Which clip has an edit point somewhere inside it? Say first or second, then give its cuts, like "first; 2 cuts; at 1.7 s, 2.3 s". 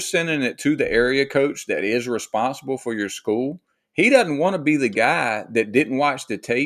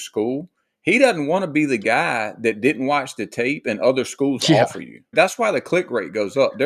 second; 1 cut; at 5.1 s